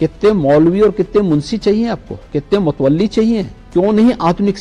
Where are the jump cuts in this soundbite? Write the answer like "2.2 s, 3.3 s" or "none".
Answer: 3.6 s